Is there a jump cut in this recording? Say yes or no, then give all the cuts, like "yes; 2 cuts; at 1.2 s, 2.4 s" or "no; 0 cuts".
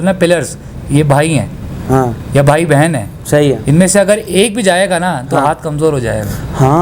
no; 0 cuts